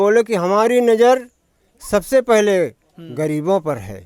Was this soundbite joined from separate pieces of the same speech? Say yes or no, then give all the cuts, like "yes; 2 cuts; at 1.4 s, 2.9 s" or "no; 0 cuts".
no; 0 cuts